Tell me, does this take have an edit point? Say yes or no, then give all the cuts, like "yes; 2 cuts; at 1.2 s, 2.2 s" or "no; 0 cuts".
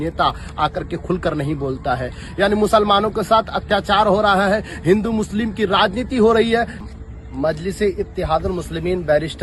no; 0 cuts